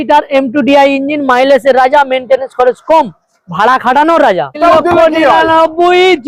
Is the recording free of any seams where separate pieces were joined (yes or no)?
no